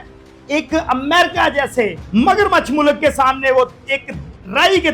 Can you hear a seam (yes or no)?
yes